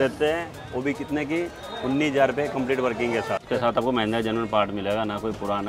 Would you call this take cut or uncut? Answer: cut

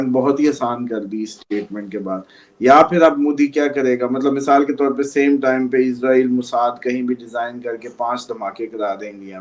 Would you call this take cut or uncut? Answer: uncut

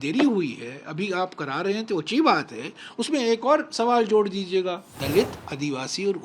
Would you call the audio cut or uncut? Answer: cut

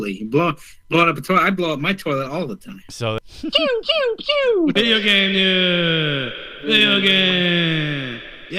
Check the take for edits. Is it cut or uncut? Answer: cut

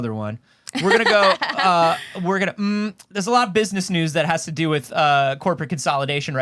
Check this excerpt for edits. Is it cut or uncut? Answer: uncut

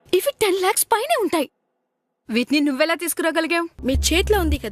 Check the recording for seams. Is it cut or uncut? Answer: cut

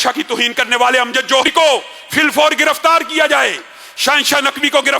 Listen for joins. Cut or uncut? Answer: cut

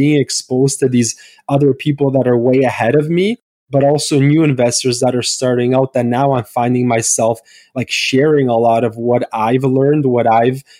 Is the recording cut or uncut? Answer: uncut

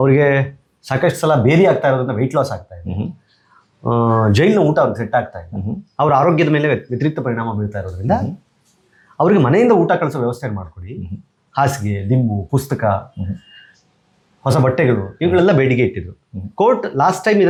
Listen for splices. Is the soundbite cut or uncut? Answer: uncut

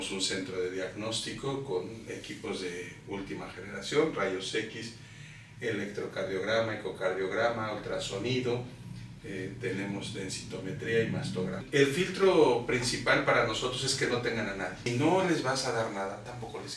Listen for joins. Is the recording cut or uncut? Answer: cut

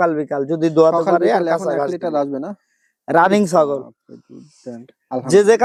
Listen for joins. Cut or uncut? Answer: uncut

